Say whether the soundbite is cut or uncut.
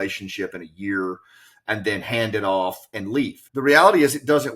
cut